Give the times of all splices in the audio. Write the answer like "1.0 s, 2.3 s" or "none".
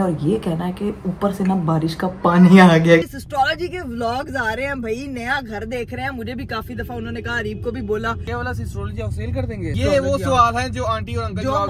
3.0 s, 8.3 s, 9.8 s